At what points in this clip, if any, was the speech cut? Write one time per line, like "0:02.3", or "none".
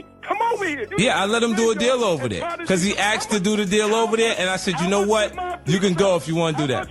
none